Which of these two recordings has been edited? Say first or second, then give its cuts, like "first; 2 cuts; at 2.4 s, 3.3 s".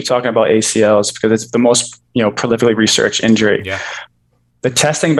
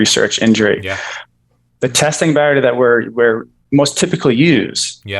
second; 1 cut; at 3.5 s